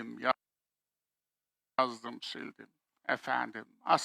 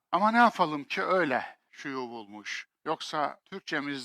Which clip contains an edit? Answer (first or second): second